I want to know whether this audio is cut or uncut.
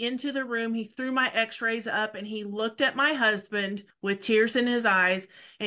cut